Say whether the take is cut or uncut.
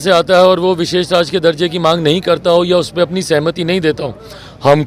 uncut